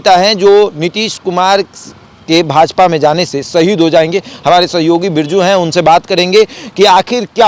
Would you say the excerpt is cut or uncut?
uncut